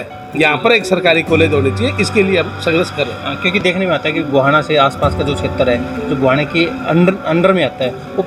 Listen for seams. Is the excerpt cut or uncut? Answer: uncut